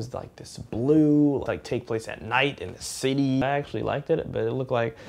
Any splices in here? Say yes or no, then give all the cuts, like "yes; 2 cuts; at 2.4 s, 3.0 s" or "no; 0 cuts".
yes; 2 cuts; at 1.4 s, 3.4 s